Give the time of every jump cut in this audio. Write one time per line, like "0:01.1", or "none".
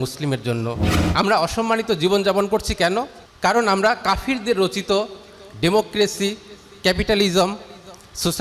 0:00.9
0:03.2